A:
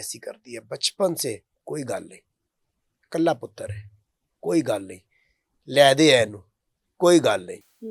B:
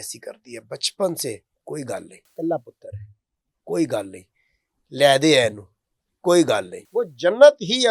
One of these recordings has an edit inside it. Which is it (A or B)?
B